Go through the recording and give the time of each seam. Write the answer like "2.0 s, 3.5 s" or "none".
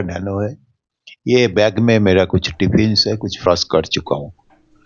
3.5 s